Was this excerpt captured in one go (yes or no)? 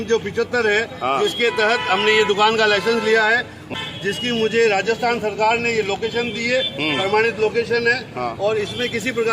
no